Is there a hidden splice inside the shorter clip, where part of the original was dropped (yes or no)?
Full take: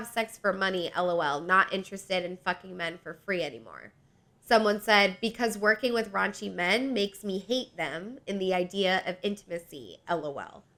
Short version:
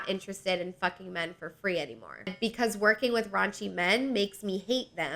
yes